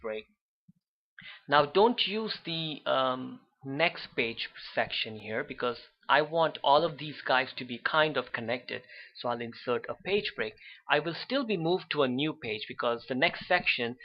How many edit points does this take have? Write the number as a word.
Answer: one